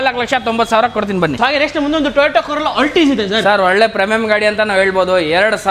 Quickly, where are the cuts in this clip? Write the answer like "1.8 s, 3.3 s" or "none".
none